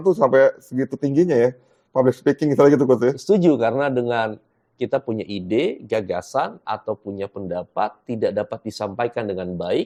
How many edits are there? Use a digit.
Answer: 0